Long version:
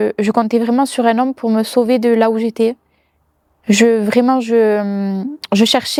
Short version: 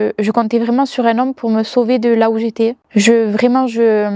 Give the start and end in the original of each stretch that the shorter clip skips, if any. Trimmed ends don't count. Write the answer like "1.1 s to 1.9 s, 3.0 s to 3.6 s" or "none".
2.8 s to 3.5 s

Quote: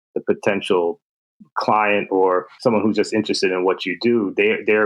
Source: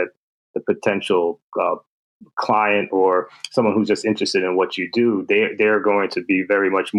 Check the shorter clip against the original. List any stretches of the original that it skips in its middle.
1.4 s to 1.9 s, 3.3 s to 3.4 s

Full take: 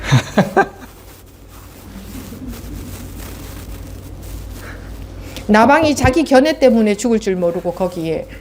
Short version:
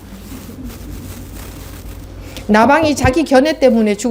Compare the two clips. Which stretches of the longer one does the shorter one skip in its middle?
3.9 s to 5.1 s

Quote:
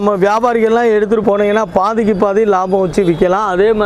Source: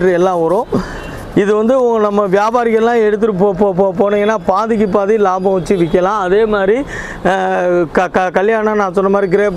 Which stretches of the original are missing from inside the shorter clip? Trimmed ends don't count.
3.3 s to 3.9 s

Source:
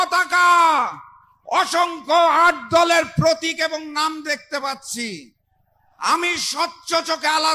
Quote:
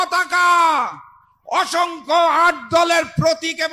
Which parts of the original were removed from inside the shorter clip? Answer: none

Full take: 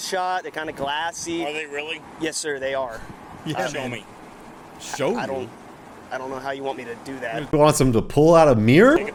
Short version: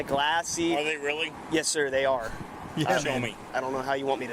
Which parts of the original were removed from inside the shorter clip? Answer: 4.1 s to 6.0 s

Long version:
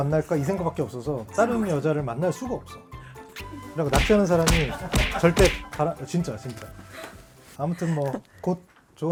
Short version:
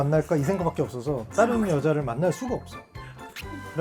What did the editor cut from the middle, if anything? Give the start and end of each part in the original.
none

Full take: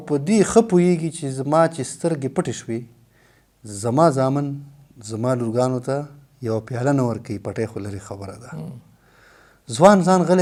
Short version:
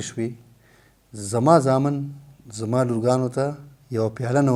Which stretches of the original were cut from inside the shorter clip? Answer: none

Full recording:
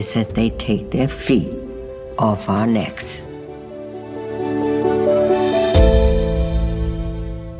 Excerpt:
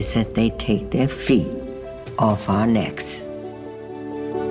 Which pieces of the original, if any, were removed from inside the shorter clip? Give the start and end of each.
2.9 s to 3.4 s

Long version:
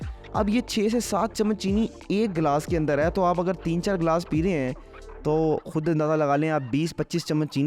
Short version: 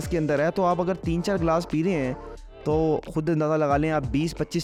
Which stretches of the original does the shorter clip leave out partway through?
none

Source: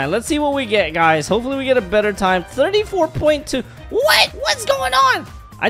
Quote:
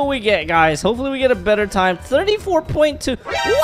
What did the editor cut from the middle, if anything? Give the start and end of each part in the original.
none

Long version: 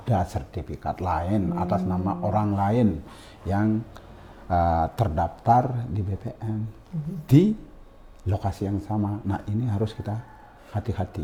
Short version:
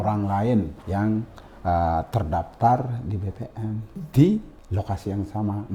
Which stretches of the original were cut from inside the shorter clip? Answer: 3.4 s to 3.9 s, 6.8 s to 7.1 s, 7.7 s to 8.1 s

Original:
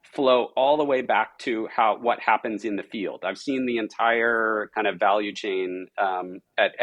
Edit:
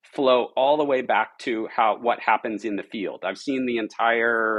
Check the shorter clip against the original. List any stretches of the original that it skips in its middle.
none

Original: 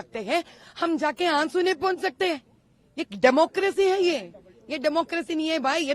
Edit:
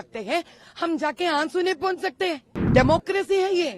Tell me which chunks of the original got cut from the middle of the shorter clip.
2.5 s to 3.0 s

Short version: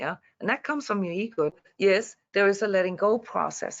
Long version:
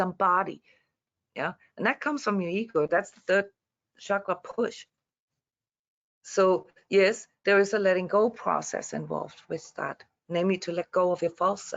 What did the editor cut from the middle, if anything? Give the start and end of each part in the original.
2.9 s to 6.6 s

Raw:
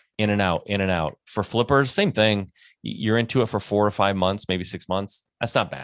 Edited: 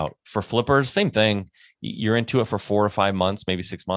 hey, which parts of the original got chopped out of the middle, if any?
none

